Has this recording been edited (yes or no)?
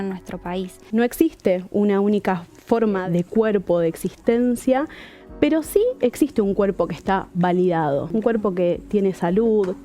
yes